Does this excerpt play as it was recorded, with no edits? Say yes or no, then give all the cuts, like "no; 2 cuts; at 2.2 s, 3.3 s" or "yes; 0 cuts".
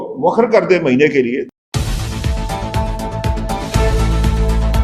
no; 1 cut; at 1.4 s